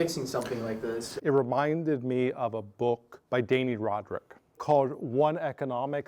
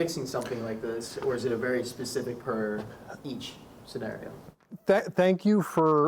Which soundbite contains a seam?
first; 3 cuts; at 1.1 s, 3.1 s, 4.6 s

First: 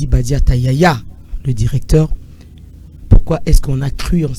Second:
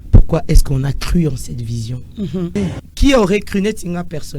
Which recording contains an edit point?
second; 1 cut; at 2.6 s

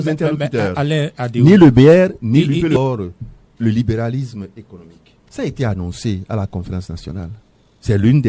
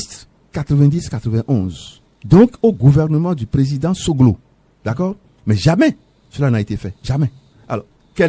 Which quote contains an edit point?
first; 1 cut; at 2.8 s

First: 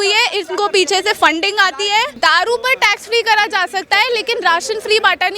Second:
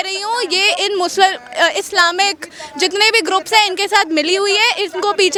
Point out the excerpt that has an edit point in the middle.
first; 1 cut; at 2.1 s

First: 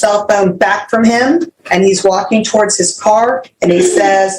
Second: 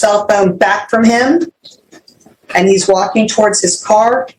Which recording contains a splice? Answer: first; 1 cut; at 1.6 s

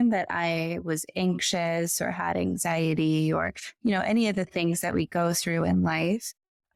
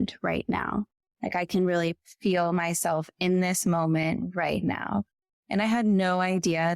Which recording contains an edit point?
second; 1 cut; at 1.0 s

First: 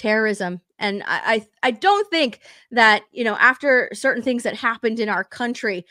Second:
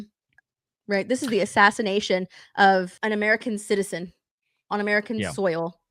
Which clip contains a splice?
second; 1 cut; at 2.9 s

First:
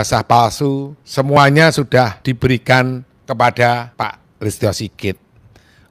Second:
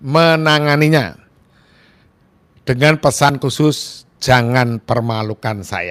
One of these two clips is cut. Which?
first; 4 cuts; at 1.0 s, 2.2 s, 3.1 s, 3.9 s

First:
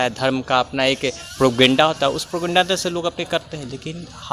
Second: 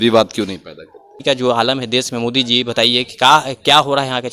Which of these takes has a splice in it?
second; 1 cut; at 1.2 s

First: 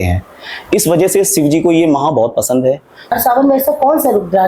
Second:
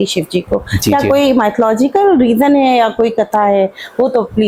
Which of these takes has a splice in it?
first; 1 cut; at 3.1 s

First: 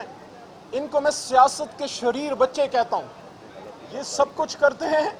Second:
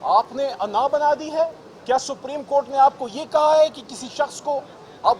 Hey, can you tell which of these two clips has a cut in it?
second; 1 cut; at 1.7 s

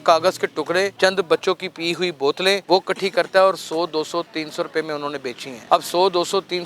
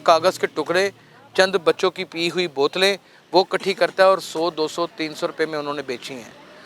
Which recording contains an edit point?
first; 3 cuts; at 0.9 s, 2.6 s, 5.5 s

